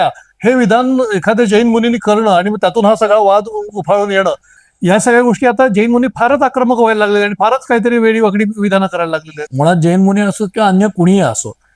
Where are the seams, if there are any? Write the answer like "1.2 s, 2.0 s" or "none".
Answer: 4.6 s, 9.4 s